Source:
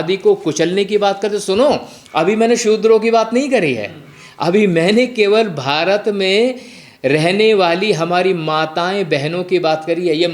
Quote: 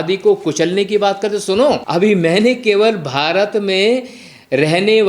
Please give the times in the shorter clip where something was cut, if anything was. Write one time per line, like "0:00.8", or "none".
0:01.8